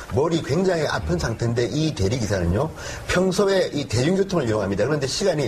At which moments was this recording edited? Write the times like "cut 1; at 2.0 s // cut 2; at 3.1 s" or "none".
cut 1; at 3.8 s